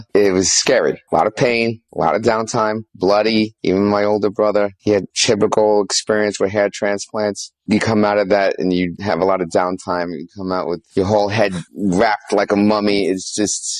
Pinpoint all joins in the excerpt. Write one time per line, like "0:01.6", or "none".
none